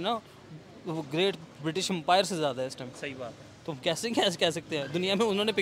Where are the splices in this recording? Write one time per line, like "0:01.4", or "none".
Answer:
none